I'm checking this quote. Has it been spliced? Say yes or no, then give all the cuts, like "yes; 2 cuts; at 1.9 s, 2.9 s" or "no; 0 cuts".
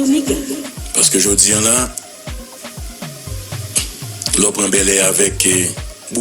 no; 0 cuts